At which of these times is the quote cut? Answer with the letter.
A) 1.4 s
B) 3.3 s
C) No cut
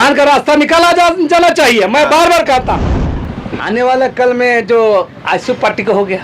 B